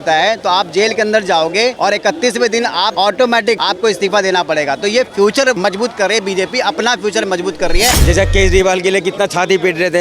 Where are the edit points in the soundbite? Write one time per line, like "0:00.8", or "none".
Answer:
0:01.8
0:02.9
0:03.6
0:05.6
0:08.0